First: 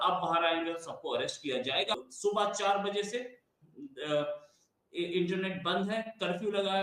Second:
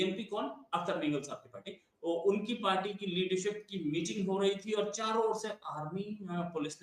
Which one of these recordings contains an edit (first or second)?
first